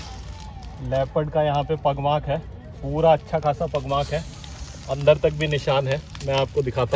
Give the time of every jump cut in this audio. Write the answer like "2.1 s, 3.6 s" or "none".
none